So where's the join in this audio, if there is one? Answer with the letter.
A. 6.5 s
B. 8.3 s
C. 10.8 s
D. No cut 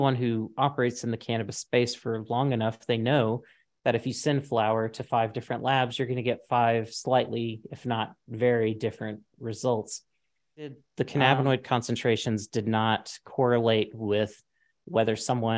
C